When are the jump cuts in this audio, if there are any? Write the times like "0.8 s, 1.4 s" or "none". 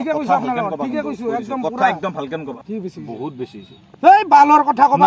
2.5 s